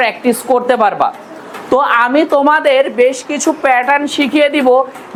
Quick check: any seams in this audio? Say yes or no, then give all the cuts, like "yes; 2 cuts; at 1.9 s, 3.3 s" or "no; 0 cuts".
no; 0 cuts